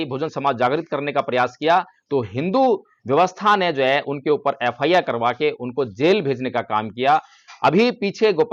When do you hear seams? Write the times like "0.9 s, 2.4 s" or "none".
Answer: none